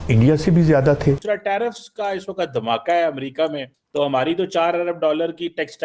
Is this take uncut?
yes; 0 cuts

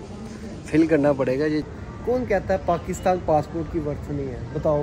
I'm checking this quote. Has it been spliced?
yes; 1 cut; at 1.6 s

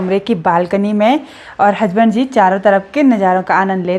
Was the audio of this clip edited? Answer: no; 0 cuts

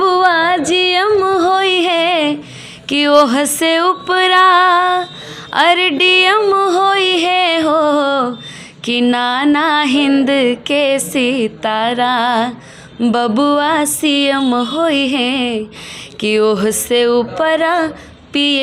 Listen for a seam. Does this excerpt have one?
no; 0 cuts

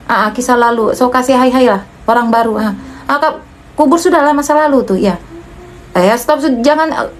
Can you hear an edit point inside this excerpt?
no; 0 cuts

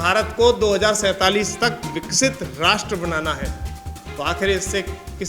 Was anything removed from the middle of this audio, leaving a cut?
no; 0 cuts

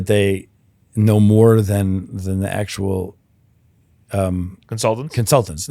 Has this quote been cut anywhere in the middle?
no; 0 cuts

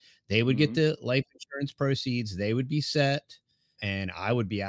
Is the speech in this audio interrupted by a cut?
yes; 1 cut; at 3.8 s

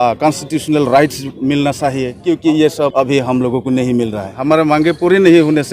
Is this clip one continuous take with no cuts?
no; 3 cuts; at 2.1 s, 2.9 s, 4.4 s

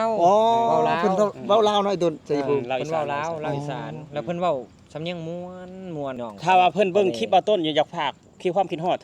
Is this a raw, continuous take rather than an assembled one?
no; 1 cut; at 6.2 s

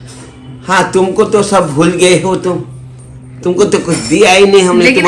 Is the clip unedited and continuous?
yes; 0 cuts

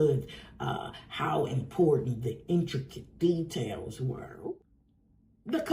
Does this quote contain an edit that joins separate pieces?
yes; 1 cut; at 4.6 s

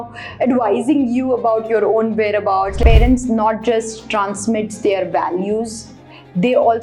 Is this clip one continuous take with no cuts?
no; 1 cut; at 2.8 s

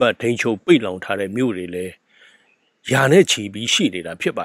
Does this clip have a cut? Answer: no; 0 cuts

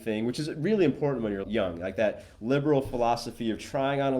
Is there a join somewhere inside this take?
yes; 1 cut; at 1.4 s

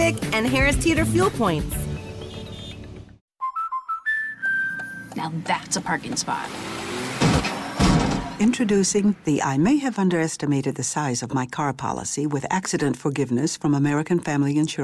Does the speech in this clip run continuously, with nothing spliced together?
no; 1 cut; at 3.2 s

